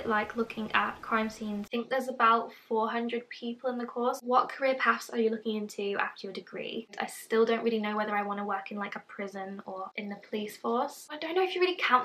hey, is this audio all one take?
no; 5 cuts; at 1.7 s, 4.2 s, 6.9 s, 9.9 s, 11.0 s

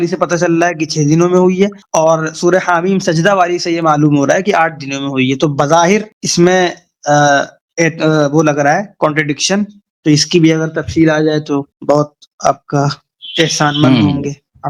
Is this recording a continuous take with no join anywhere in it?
yes; 0 cuts

